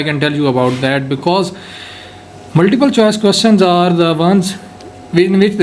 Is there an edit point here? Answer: no; 0 cuts

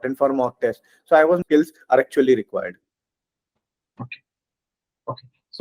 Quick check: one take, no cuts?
no; 1 cut; at 1.4 s

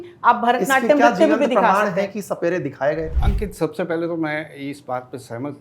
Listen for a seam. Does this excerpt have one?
yes; 1 cut; at 3.2 s

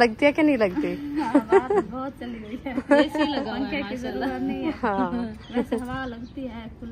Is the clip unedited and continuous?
yes; 0 cuts

